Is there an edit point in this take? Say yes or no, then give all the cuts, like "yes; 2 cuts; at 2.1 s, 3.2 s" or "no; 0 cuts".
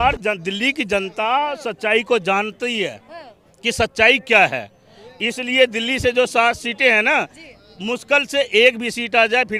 no; 0 cuts